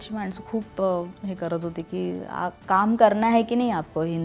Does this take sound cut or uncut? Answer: uncut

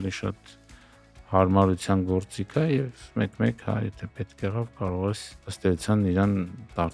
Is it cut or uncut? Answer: uncut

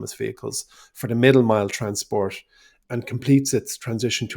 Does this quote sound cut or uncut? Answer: cut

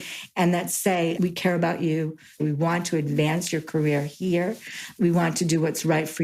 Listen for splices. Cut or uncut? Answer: cut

